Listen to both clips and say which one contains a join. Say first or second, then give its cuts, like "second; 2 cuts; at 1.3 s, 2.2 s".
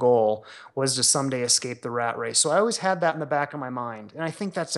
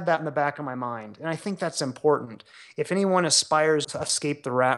second; 1 cut; at 3.9 s